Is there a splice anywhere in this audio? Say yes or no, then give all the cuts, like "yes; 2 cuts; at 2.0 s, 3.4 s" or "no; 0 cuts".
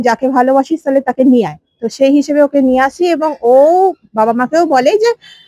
no; 0 cuts